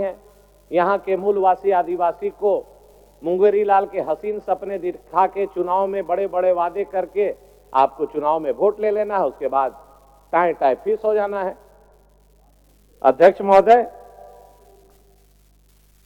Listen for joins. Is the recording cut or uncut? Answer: uncut